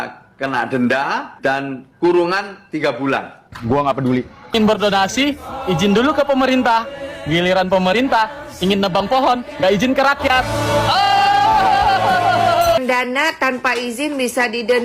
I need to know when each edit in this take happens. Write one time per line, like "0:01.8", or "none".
0:04.5
0:12.8